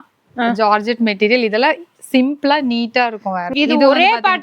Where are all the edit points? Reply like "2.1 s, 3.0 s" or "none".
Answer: 3.5 s